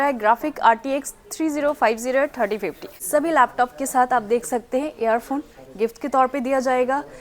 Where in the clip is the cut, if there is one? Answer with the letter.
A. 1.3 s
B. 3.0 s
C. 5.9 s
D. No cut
B